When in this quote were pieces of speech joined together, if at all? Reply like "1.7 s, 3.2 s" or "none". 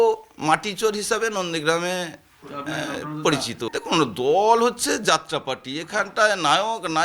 3.7 s